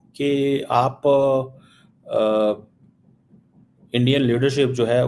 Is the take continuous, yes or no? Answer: yes